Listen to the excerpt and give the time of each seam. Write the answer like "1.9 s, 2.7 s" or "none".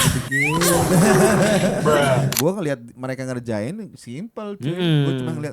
2.3 s